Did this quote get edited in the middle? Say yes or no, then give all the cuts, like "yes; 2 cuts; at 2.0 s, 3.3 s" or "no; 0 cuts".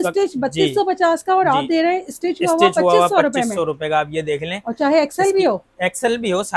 no; 0 cuts